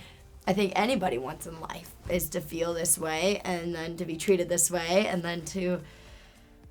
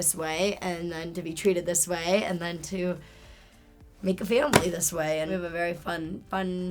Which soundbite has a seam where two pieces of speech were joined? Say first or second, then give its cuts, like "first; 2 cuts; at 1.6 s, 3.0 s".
second; 1 cut; at 5.3 s